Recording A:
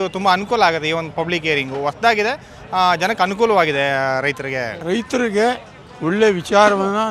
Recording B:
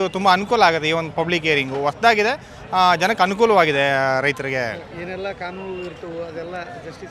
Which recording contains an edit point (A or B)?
A